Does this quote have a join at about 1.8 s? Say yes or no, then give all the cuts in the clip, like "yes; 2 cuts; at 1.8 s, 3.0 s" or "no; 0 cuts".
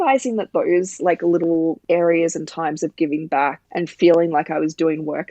yes; 2 cuts; at 1.8 s, 3.6 s